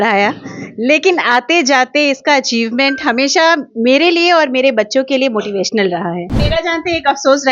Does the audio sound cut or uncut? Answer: cut